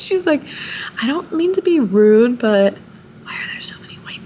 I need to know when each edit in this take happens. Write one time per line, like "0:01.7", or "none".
none